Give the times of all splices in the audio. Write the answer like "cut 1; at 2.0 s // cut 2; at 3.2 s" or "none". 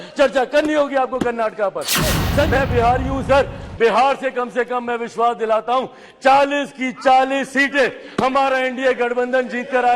cut 1; at 2.2 s